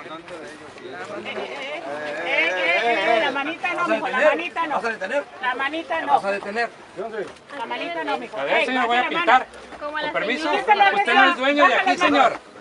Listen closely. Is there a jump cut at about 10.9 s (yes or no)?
no